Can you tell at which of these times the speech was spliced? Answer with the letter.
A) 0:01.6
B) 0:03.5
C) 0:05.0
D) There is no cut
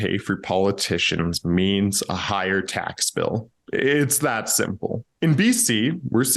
C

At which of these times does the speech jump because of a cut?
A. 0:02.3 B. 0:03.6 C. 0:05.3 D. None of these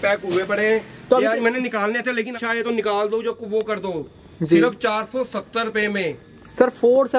A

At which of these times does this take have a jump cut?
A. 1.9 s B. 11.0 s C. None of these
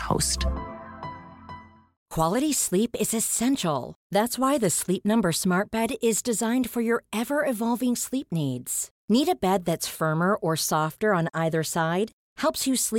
A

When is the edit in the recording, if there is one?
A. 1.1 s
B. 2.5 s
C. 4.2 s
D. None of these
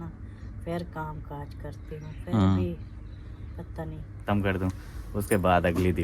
C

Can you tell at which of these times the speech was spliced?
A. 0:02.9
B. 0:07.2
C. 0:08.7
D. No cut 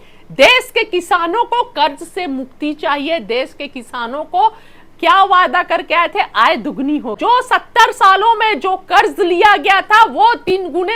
B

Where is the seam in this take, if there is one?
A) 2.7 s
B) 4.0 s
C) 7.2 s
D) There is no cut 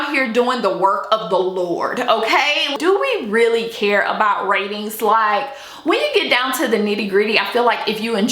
A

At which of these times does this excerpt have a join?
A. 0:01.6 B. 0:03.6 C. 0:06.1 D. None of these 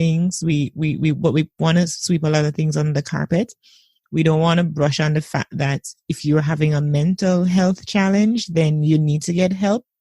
D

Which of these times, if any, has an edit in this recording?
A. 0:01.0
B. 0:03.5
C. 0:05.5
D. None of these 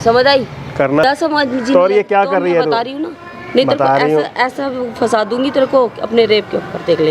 A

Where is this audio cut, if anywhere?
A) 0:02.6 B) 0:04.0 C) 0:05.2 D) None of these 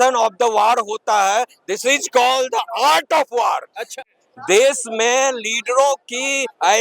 B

